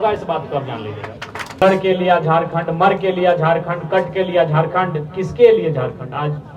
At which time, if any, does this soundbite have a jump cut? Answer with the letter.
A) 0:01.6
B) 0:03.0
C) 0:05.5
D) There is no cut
A